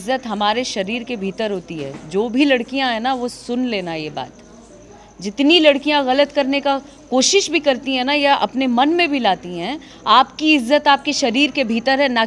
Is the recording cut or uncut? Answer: uncut